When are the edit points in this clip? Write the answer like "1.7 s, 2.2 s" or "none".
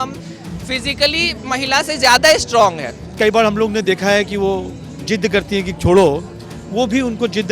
3.0 s